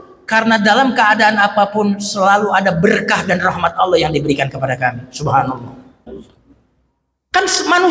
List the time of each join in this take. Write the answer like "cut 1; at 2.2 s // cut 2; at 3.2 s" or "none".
cut 1; at 6.1 s